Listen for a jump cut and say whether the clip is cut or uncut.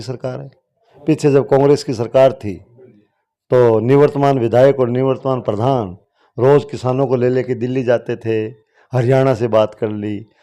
uncut